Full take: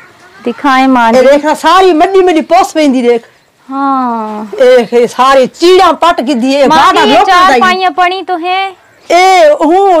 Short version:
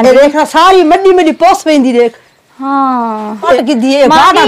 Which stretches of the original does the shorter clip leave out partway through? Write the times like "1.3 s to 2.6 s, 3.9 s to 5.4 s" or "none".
4.7 s to 6.2 s